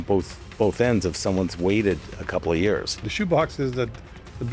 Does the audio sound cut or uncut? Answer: cut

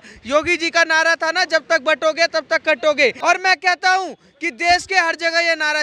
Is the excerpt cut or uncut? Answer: uncut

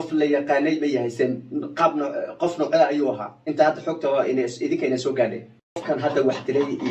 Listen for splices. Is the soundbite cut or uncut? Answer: cut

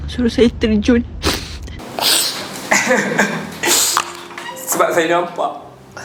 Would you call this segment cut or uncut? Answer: cut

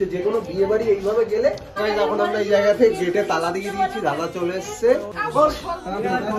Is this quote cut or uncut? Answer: cut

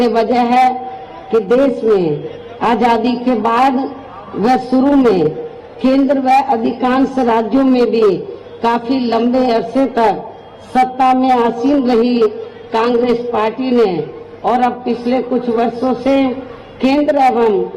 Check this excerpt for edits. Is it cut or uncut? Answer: cut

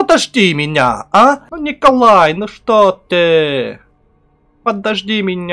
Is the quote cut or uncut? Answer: cut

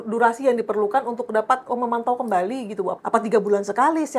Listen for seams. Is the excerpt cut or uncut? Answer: cut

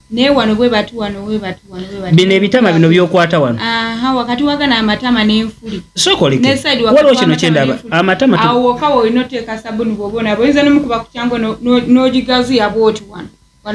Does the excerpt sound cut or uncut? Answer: uncut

